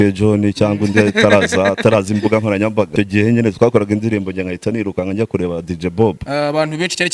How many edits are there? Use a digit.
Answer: 2